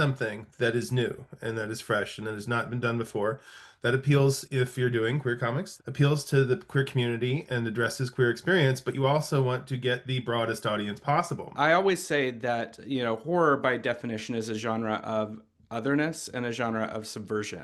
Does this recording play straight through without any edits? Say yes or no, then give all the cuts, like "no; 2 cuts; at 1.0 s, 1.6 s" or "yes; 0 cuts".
no; 2 cuts; at 5.7 s, 11.5 s